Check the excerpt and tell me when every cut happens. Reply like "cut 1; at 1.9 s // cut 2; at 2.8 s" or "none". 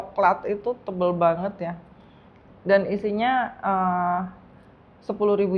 none